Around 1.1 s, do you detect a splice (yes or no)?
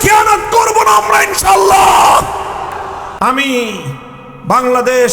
no